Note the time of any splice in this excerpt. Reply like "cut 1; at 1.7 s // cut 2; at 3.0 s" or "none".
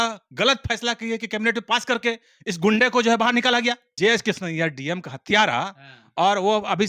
cut 1; at 3.9 s